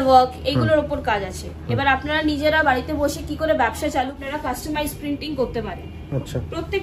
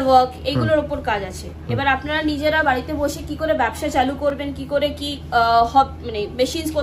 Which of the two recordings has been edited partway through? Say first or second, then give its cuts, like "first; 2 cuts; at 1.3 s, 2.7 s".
first; 1 cut; at 4.1 s